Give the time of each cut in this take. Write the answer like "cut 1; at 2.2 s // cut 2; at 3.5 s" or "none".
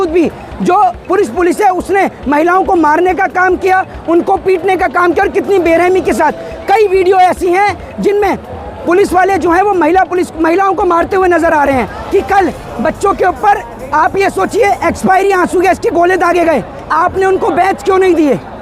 cut 1; at 12.0 s // cut 2; at 16.9 s